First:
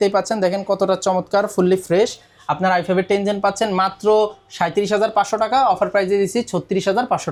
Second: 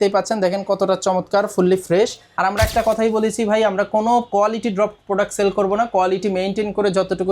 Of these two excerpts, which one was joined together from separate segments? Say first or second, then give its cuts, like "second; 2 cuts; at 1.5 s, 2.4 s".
second; 1 cut; at 2.2 s